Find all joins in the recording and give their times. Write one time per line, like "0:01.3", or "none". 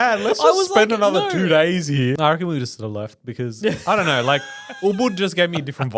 0:02.2